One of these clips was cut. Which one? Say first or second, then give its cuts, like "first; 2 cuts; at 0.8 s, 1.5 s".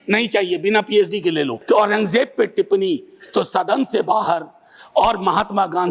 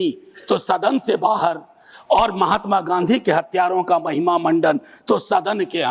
first; 1 cut; at 1.6 s